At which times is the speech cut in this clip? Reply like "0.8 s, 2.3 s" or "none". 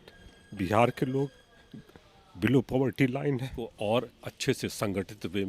3.6 s